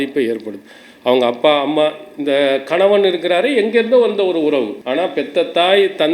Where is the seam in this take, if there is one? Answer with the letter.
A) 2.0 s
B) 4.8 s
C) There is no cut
B